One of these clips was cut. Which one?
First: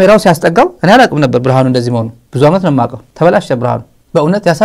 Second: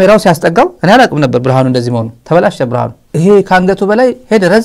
second; 2 cuts; at 2.1 s, 3.0 s

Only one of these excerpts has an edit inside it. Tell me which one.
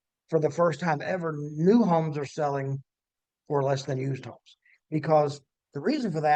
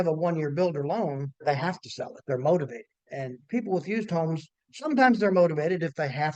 second; 2 cuts; at 1.4 s, 3.1 s

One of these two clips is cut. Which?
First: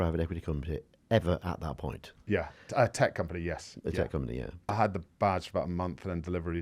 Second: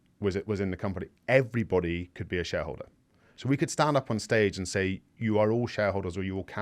first; 2 cuts; at 1.0 s, 4.6 s

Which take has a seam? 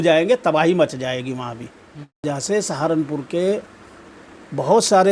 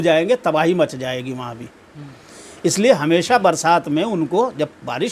first; 1 cut; at 2.3 s

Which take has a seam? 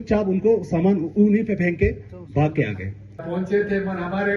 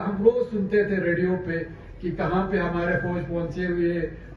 first; 1 cut; at 3.2 s

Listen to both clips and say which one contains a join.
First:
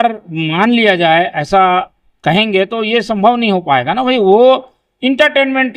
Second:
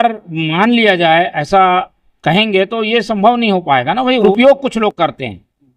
second; 1 cut; at 4.3 s

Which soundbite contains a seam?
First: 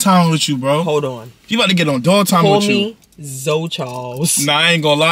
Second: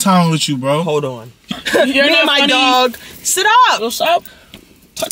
second; 1 cut; at 1.4 s

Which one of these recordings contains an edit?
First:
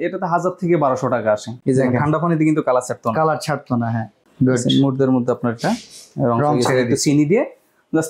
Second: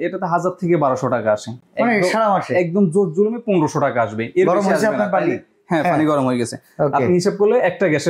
first; 1 cut; at 1.5 s

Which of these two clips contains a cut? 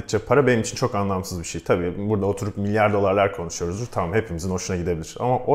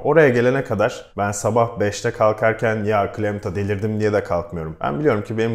second; 2 cuts; at 1.1 s, 4.6 s

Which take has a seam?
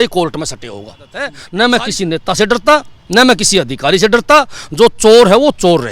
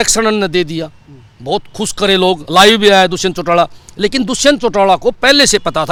first; 1 cut; at 1.4 s

